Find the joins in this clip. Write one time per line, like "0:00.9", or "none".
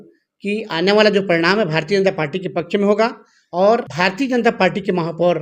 0:03.9

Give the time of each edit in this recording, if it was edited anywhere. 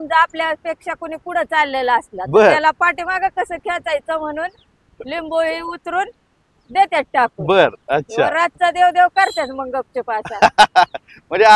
none

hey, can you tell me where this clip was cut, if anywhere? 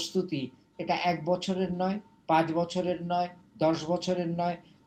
none

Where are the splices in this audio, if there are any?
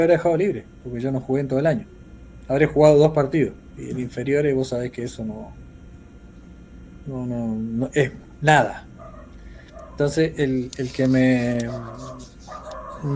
none

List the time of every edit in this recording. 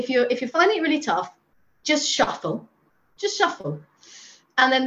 none

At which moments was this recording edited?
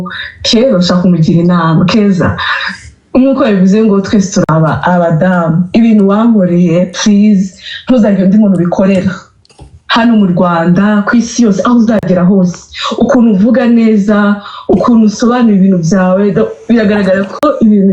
none

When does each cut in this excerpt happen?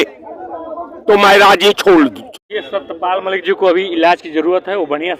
0:02.2

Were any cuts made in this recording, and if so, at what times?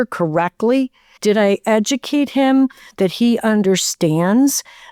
none

